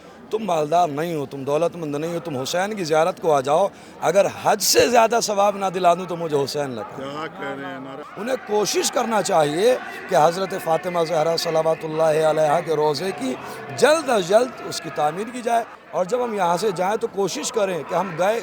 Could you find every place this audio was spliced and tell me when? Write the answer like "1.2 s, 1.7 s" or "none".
8.0 s, 15.8 s